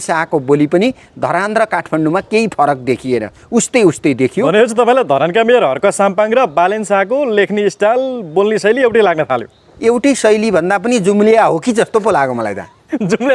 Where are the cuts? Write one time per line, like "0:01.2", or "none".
0:09.6